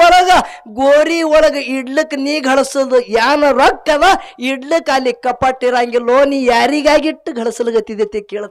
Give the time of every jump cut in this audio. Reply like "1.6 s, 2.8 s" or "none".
none